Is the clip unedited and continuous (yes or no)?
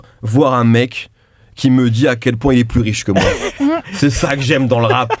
yes